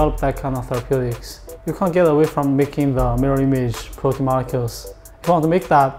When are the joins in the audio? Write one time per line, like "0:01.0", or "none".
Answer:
0:01.5